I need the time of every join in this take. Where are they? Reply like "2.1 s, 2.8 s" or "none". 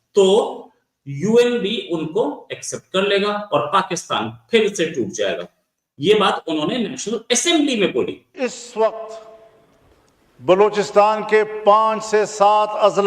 8.2 s